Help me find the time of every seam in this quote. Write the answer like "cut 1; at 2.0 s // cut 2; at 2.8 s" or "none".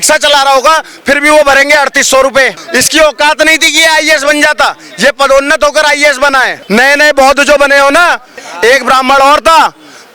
cut 1; at 2.6 s // cut 2; at 6.5 s // cut 3; at 8.3 s